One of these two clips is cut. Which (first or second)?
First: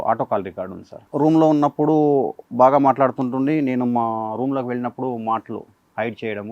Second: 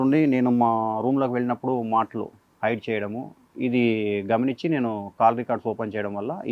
first